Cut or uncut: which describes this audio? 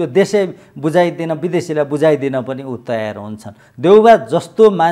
uncut